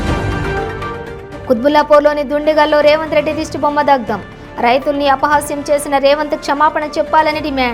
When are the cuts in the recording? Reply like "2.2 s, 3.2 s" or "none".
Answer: 1.3 s